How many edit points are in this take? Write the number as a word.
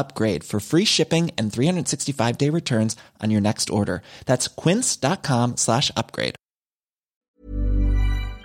one